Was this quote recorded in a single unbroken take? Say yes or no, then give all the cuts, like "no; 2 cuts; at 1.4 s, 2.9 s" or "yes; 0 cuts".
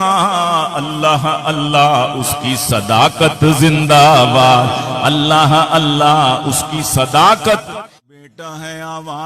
no; 1 cut; at 7.7 s